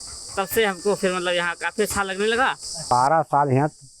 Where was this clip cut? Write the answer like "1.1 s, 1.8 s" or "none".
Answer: 2.9 s